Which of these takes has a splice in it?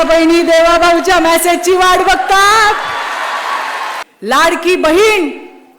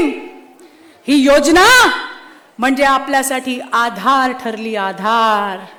first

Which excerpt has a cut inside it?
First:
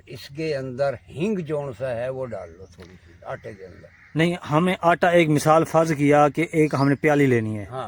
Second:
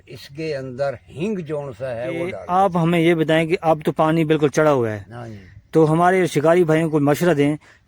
second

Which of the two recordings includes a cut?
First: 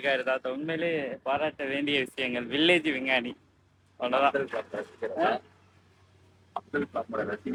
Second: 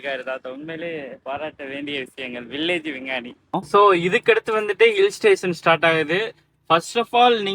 second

